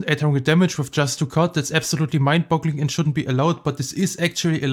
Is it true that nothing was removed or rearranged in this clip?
yes; 0 cuts

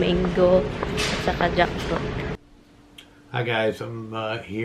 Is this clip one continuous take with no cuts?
no; 1 cut; at 2.4 s

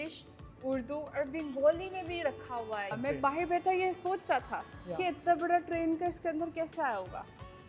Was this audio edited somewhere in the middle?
yes; 1 cut; at 2.9 s

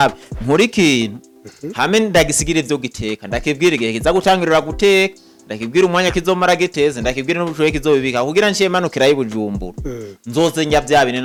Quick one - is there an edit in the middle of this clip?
no; 0 cuts

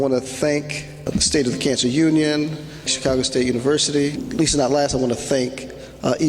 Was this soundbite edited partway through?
yes; 3 cuts; at 1.1 s, 2.9 s, 4.2 s

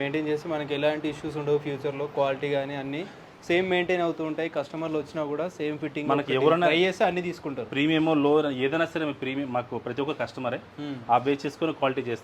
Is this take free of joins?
yes; 0 cuts

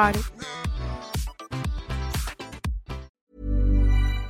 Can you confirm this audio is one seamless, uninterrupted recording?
no; 1 cut; at 3.2 s

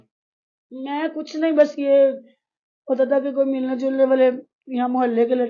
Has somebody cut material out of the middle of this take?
no; 0 cuts

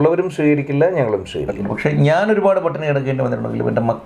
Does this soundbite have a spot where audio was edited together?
yes; 1 cut; at 1.6 s

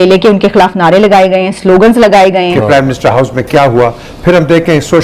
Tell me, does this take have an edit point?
yes; 1 cut; at 2.6 s

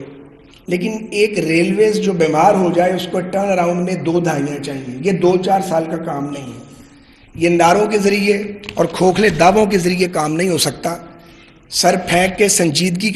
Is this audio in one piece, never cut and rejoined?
yes; 0 cuts

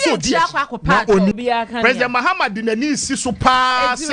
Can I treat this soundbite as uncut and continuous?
no; 1 cut; at 1.3 s

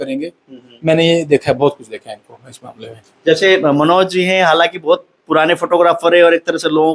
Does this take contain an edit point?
no; 0 cuts

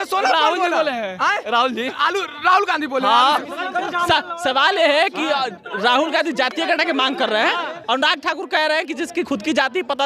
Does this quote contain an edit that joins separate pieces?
no; 0 cuts

